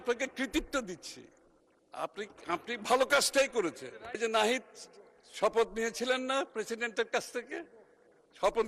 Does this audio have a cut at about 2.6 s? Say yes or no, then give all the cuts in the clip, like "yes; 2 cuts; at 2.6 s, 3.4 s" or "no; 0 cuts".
no; 1 cut; at 4.2 s